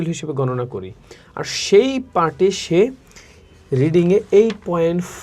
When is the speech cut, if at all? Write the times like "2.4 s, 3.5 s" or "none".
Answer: none